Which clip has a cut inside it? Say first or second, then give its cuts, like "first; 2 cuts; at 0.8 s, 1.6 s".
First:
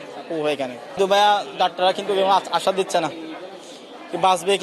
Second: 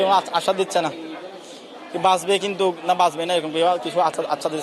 first; 1 cut; at 1.0 s